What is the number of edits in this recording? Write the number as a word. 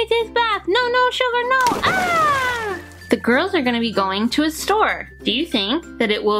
two